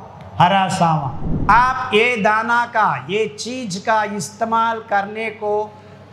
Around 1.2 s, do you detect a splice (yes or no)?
yes